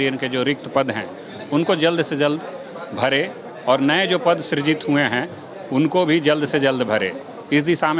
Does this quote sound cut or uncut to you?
uncut